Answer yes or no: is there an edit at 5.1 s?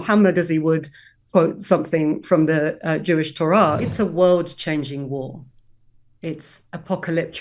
no